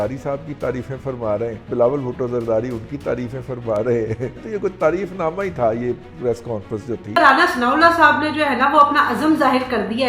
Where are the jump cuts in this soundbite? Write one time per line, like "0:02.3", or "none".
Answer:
0:01.7
0:04.4
0:07.2